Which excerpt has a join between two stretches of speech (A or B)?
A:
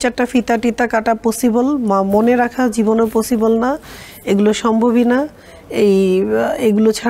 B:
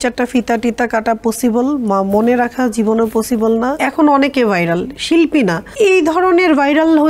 B